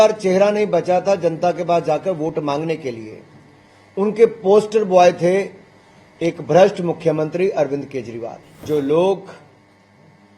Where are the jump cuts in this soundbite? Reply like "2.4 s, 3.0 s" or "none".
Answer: 8.6 s